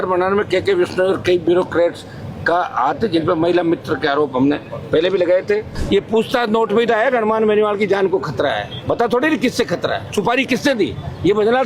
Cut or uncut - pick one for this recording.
cut